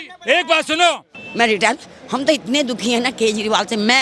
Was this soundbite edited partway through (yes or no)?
yes